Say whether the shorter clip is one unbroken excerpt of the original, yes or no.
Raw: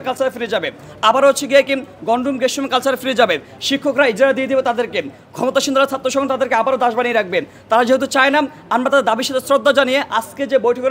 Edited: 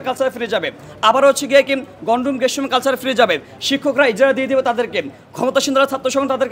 yes